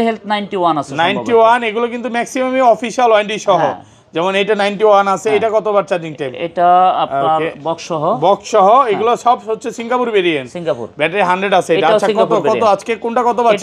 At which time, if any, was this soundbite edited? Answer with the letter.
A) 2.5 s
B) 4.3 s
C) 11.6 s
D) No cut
D